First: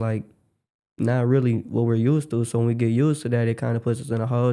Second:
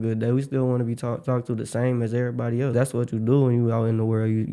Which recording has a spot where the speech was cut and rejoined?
second; 1 cut; at 2.7 s

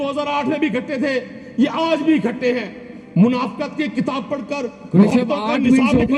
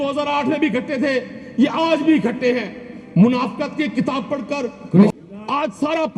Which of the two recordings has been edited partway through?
second; 1 cut; at 5.1 s

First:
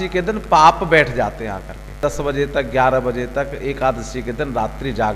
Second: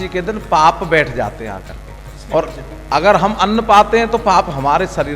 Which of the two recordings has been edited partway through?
first; 1 cut; at 2.0 s

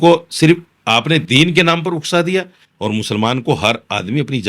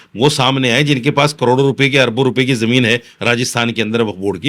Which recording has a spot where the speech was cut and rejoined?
first; 1 cut; at 2.6 s

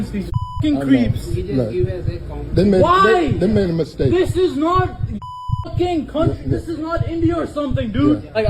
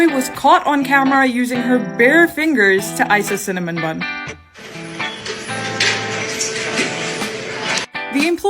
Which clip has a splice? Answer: second; 2 cuts; at 4.2 s, 6.9 s

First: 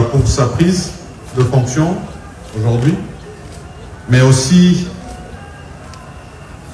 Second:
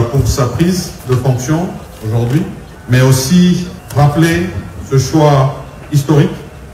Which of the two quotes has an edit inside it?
second; 4 cuts; at 0.9 s, 1.9 s, 2.7 s, 3.8 s

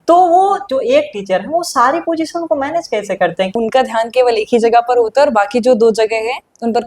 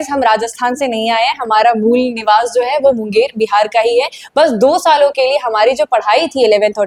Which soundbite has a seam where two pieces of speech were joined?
first; 1 cut; at 3.5 s

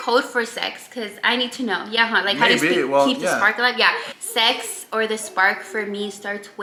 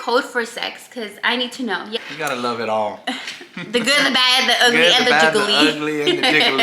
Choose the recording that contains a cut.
second; 1 cut; at 2.0 s

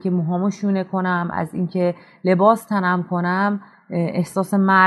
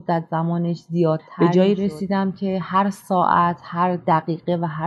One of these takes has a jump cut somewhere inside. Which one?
second; 1 cut; at 1.3 s

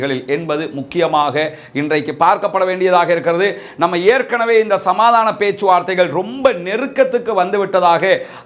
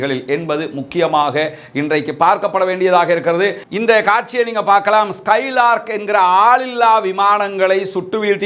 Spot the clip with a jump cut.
second; 1 cut; at 3.6 s

